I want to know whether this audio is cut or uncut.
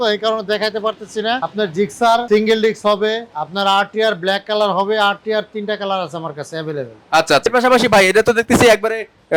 cut